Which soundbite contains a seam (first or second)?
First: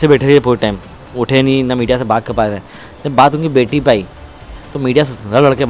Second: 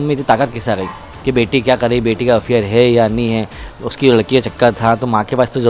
second